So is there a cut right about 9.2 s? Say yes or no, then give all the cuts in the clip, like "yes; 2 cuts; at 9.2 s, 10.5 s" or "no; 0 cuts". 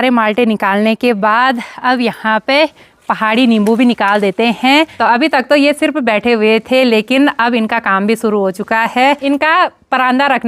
yes; 2 cuts; at 4.9 s, 9.2 s